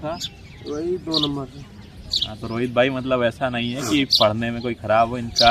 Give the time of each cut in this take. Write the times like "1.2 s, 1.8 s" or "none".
none